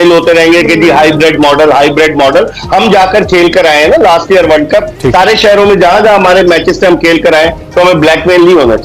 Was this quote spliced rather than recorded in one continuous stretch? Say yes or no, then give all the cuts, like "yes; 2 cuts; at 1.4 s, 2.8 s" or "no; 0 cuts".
no; 0 cuts